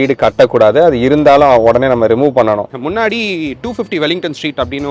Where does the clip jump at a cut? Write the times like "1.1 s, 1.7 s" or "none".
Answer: 2.6 s